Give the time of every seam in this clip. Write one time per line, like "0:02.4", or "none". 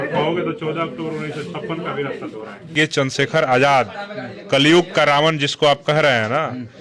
0:02.7